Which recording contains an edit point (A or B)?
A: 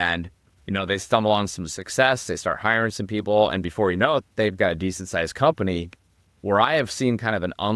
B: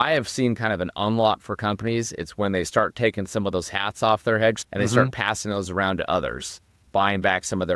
B